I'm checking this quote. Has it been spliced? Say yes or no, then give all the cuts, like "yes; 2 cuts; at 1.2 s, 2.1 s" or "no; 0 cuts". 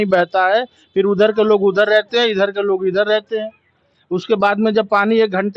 no; 0 cuts